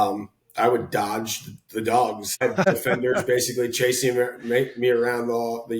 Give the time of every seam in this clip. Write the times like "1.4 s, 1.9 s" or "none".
2.8 s